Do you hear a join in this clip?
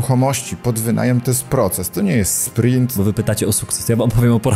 yes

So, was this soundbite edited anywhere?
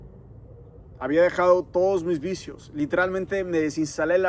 no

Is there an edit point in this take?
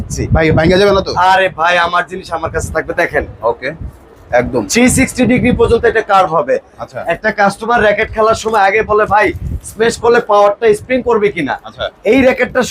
no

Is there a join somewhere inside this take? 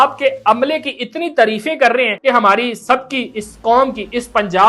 yes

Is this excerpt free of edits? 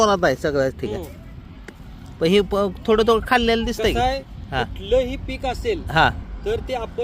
yes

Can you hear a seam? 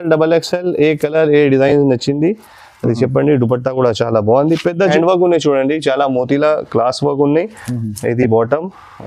yes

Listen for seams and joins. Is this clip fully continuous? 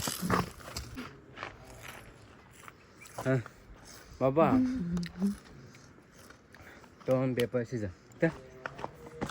no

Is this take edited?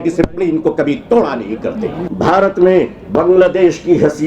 yes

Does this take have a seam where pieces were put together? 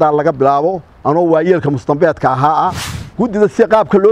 yes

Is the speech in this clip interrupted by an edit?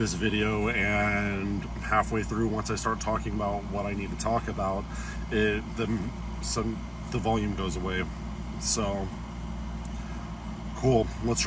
no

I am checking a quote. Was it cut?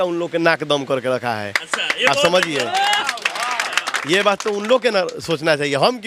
no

